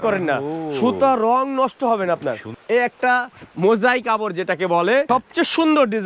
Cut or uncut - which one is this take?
cut